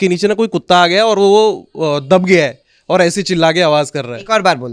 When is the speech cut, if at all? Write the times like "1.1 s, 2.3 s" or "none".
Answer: none